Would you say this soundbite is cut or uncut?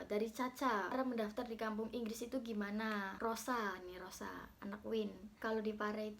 cut